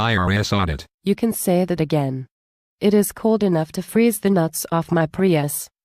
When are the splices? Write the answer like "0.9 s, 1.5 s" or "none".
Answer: none